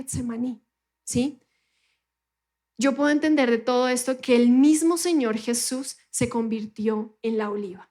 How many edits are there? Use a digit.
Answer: 0